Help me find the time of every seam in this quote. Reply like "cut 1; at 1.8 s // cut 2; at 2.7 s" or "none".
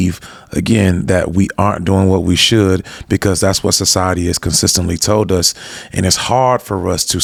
none